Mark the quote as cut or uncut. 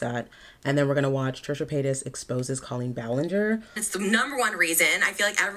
cut